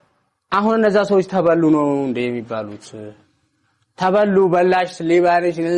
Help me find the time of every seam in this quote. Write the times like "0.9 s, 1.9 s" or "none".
none